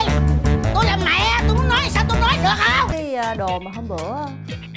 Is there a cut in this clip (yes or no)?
yes